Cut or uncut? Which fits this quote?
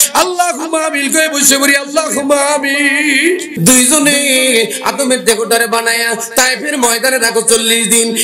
cut